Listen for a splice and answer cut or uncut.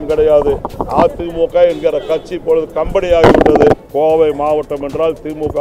cut